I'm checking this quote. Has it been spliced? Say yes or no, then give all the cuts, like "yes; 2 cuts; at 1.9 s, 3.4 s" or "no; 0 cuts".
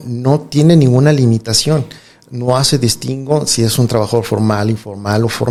no; 0 cuts